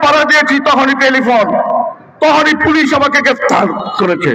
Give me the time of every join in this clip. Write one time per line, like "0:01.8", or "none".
none